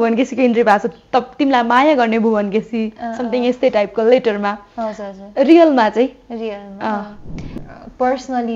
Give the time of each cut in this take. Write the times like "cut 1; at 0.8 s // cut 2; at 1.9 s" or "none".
cut 1; at 7.3 s